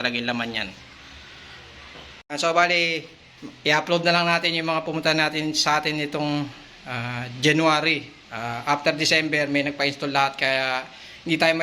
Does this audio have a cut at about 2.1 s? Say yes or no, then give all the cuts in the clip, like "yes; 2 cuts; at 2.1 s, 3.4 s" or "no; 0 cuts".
yes; 1 cut; at 2.1 s